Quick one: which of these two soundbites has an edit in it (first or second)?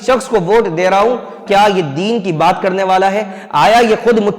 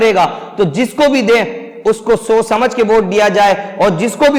first